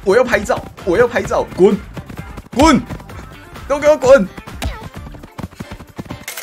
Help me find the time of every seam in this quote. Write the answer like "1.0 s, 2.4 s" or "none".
none